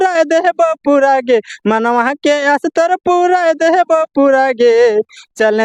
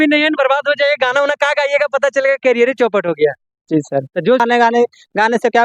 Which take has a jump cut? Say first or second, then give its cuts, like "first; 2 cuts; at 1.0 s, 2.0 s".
second; 1 cut; at 4.5 s